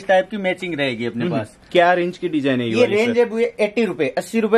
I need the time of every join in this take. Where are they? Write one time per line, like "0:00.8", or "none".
none